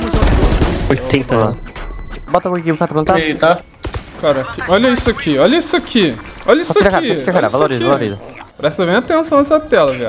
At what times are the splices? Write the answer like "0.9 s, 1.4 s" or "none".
2.2 s, 8.4 s